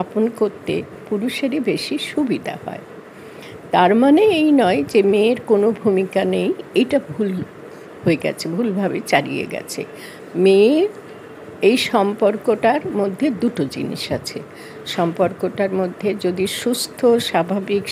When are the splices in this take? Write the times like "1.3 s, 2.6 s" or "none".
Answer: none